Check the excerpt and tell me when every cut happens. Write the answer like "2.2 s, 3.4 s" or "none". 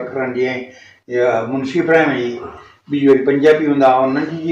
none